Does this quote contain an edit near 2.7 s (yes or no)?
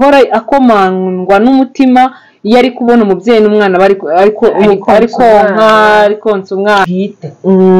no